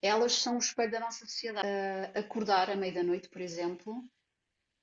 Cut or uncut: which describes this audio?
cut